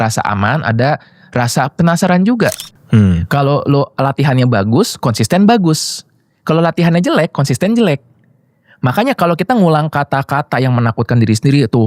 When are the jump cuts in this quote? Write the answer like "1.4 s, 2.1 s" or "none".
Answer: 2.7 s